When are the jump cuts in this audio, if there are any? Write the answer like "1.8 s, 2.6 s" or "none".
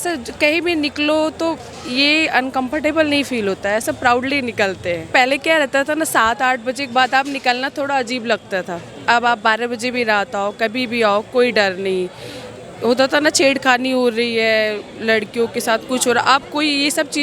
5.1 s